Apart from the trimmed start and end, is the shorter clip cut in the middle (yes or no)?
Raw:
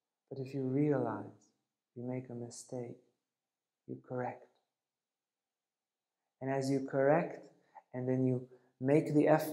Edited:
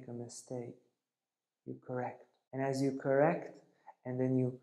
yes